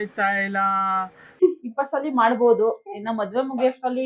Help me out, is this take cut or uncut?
uncut